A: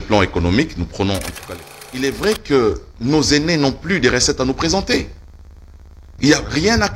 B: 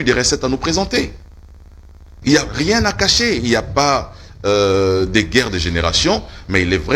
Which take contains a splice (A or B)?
A